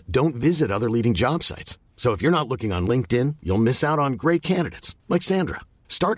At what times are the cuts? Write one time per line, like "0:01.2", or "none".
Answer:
none